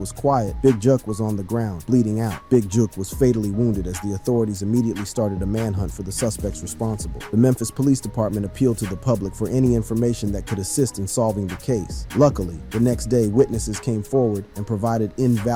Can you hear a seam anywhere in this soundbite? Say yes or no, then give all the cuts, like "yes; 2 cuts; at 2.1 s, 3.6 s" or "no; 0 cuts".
no; 0 cuts